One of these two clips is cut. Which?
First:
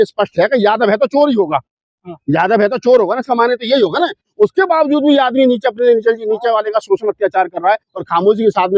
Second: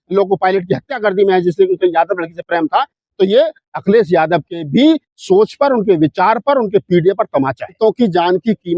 second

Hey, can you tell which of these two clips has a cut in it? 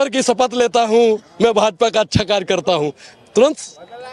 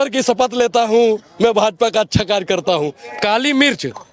second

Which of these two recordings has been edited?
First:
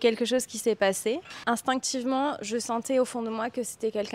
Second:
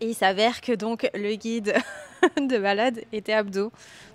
first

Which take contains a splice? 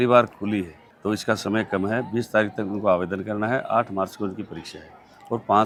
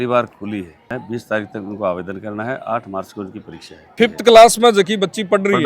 second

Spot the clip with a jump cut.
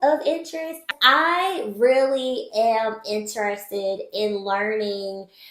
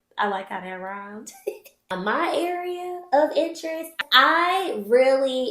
second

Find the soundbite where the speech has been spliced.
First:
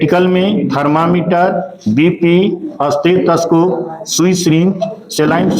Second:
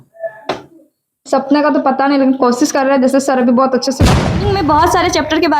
second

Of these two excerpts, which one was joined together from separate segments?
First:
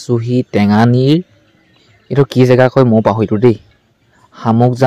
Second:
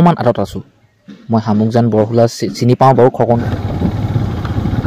second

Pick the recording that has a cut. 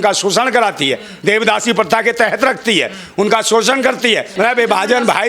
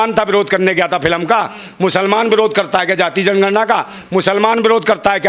first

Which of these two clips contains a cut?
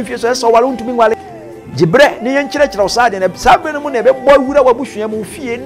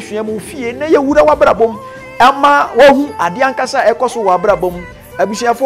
second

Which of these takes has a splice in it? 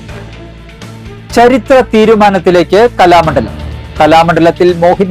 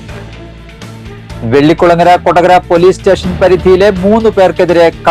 second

